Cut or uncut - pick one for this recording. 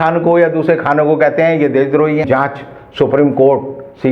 cut